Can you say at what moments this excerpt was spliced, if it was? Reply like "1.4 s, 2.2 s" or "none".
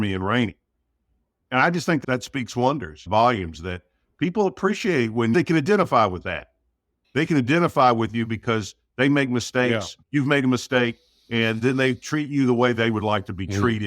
5.3 s, 9.9 s